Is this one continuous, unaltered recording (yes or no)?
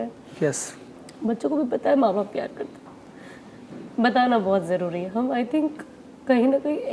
yes